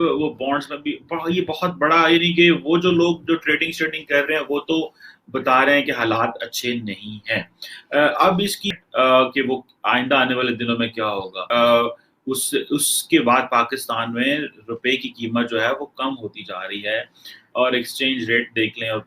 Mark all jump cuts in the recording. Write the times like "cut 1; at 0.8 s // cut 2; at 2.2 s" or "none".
cut 1; at 8.8 s // cut 2; at 11.4 s